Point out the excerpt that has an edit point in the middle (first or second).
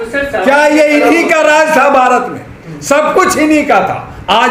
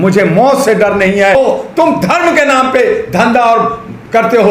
second